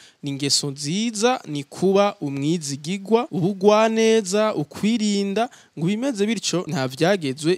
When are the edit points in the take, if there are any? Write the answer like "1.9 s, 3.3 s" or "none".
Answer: 3.3 s, 6.7 s